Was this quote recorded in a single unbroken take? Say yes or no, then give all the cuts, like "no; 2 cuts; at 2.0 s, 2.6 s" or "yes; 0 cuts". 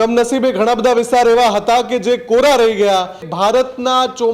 no; 1 cut; at 3.3 s